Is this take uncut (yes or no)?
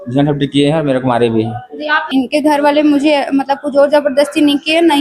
no